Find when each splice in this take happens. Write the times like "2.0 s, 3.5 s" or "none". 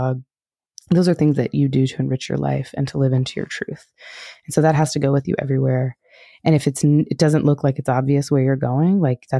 none